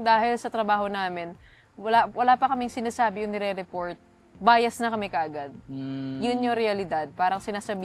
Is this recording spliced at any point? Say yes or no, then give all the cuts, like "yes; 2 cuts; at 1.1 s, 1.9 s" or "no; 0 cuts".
no; 0 cuts